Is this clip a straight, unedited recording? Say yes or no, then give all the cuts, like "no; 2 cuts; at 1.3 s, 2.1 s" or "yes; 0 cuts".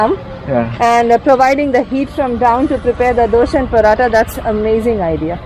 yes; 0 cuts